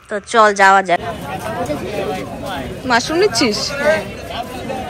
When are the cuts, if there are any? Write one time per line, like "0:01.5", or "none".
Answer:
0:01.0